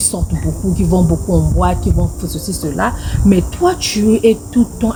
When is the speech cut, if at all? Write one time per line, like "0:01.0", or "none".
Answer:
none